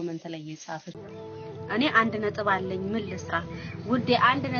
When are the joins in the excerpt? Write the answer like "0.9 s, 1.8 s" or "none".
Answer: 1.0 s